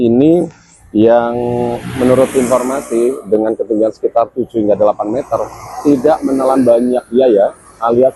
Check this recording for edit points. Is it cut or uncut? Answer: uncut